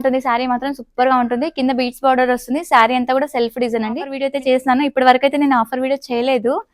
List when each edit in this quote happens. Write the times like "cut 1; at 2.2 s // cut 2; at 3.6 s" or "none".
cut 1; at 4.2 s